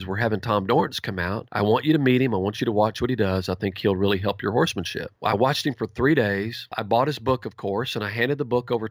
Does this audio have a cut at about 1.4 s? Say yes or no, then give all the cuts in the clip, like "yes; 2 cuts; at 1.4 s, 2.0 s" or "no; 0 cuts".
yes; 3 cuts; at 1.4 s, 5.0 s, 6.7 s